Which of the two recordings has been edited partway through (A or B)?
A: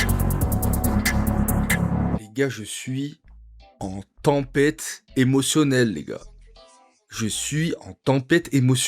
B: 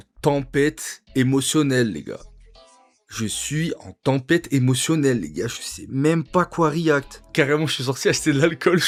A